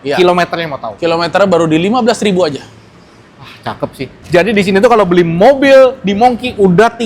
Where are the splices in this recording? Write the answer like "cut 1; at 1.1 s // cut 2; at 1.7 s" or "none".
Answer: cut 1; at 4.1 s